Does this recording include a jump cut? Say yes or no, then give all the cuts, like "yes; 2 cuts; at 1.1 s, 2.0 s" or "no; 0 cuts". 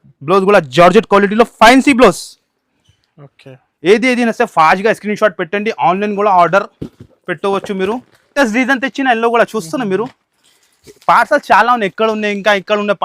yes; 1 cut; at 8.3 s